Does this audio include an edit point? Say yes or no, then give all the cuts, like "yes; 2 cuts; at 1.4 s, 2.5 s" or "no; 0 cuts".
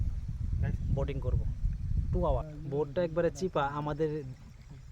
yes; 1 cut; at 2.5 s